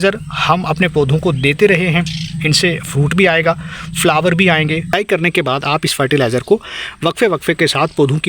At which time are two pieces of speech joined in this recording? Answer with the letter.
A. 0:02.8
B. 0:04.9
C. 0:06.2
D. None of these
B